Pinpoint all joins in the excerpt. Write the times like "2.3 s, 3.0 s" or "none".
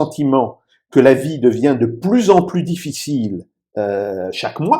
none